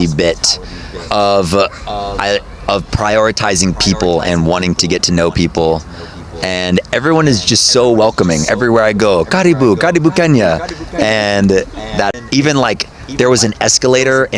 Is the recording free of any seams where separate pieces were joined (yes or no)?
no